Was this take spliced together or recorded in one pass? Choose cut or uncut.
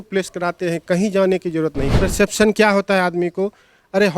cut